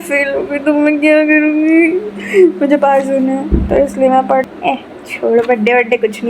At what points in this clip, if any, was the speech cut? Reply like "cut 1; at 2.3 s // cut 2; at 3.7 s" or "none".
cut 1; at 4.5 s